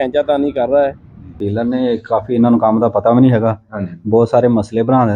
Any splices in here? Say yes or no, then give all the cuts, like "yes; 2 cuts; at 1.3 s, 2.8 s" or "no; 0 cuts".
yes; 1 cut; at 1.4 s